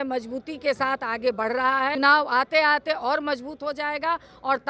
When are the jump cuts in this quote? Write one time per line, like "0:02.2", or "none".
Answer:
0:01.9